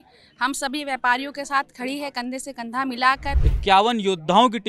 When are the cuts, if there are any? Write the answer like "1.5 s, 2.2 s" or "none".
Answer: 3.4 s